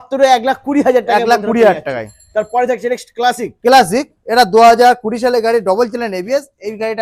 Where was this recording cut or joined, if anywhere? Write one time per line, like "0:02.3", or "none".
none

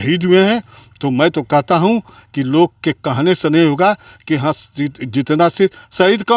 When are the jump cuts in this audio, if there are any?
none

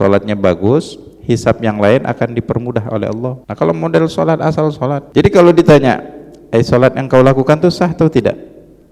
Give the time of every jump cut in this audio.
0:03.4
0:05.0

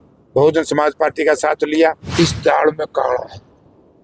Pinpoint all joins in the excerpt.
0:02.0

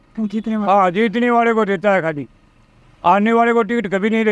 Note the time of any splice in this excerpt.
none

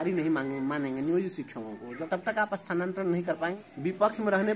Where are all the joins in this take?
0:01.9
0:03.5

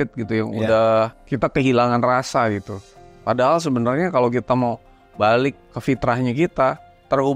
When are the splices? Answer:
0:01.2
0:05.6

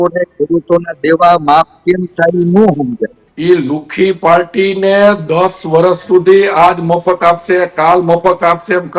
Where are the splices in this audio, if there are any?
0:03.2

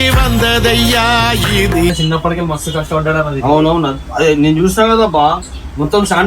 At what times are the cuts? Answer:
0:01.9

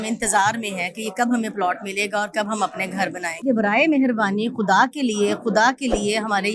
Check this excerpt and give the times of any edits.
0:03.4

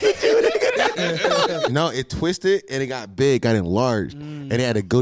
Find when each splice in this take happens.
0:01.7

